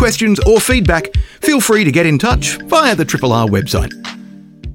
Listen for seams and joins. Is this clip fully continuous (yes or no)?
no